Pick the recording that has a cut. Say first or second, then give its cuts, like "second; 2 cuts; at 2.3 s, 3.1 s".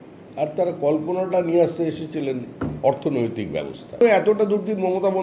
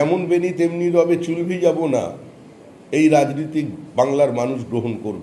first; 1 cut; at 4.0 s